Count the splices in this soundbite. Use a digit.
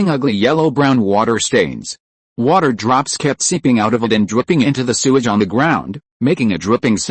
1